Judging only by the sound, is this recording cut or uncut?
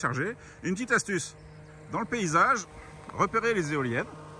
uncut